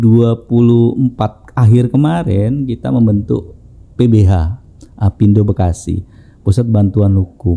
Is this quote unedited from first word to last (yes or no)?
yes